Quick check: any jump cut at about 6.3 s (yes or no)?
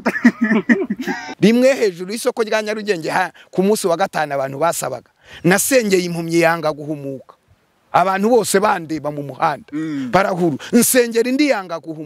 no